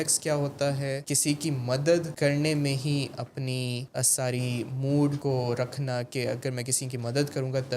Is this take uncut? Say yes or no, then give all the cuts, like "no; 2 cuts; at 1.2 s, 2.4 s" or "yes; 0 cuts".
no; 4 cuts; at 1.1 s, 2.1 s, 3.8 s, 5.2 s